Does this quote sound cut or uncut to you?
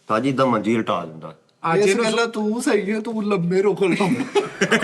cut